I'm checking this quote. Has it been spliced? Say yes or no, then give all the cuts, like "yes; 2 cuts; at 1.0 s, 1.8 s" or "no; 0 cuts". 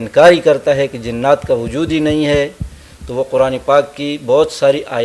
no; 0 cuts